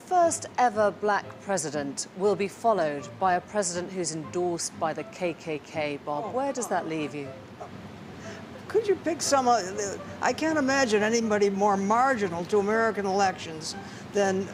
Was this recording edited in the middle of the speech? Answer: no; 0 cuts

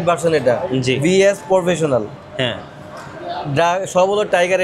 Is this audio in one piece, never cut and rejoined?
yes; 0 cuts

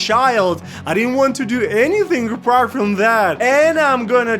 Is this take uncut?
no; 1 cut; at 3.4 s

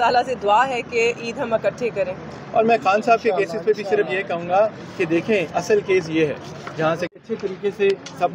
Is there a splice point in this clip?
yes; 1 cut; at 7.1 s

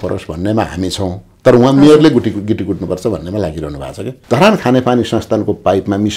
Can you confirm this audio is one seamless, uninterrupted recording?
no; 1 cut; at 4.1 s

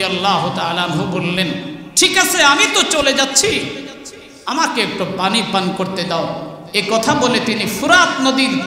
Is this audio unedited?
no; 1 cut; at 1.8 s

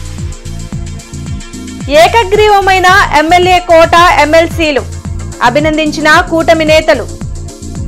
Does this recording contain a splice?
no; 0 cuts

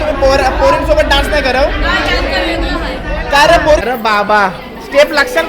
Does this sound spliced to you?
yes; 1 cut; at 3.8 s

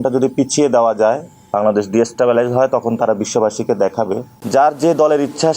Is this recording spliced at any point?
yes; 1 cut; at 4.3 s

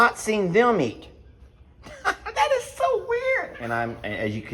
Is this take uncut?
no; 1 cut; at 3.6 s

